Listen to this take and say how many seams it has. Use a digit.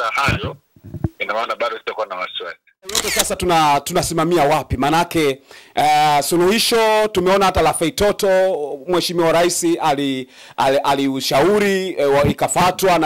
1